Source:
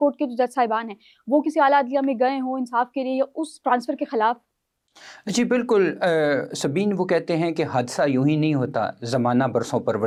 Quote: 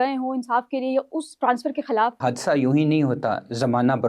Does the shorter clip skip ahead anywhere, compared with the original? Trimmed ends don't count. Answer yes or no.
yes